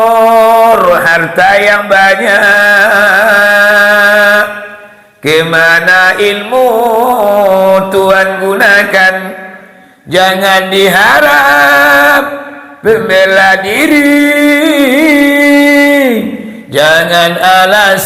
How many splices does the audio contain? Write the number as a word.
zero